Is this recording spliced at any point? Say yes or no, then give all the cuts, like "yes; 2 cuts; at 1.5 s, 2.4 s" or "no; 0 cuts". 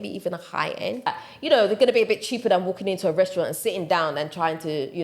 yes; 1 cut; at 1.1 s